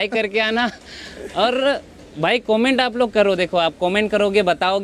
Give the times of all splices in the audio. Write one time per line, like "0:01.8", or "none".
none